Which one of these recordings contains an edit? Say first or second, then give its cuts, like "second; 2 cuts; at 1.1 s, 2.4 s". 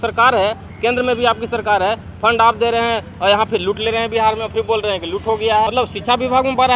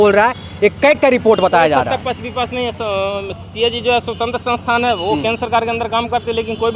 first; 1 cut; at 5.7 s